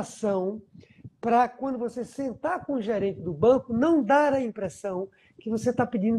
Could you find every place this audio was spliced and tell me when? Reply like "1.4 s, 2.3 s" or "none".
none